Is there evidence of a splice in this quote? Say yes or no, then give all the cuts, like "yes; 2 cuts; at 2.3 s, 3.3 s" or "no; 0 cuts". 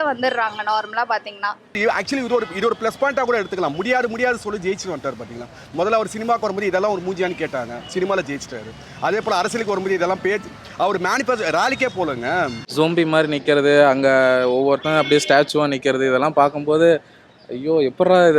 yes; 2 cuts; at 1.6 s, 12.7 s